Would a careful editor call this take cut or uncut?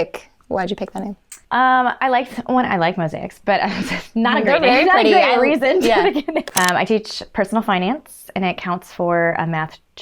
cut